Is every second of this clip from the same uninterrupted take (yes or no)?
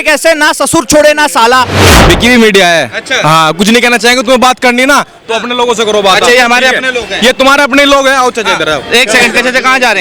no